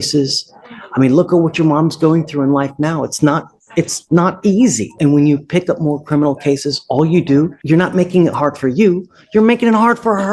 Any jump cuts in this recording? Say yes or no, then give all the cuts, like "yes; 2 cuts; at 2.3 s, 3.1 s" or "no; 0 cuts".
yes; 2 cuts; at 4.9 s, 7.6 s